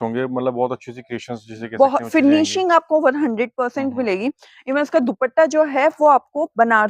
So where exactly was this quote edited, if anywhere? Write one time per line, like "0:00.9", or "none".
none